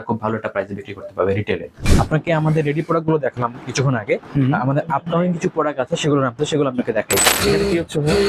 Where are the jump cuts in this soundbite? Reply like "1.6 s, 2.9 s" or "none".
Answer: 1.7 s, 7.2 s